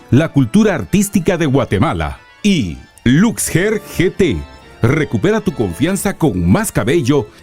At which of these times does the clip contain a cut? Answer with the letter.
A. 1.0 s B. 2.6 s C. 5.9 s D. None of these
B